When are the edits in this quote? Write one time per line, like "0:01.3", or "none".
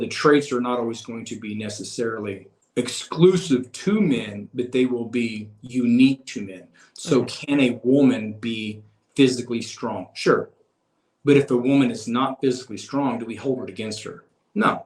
0:02.5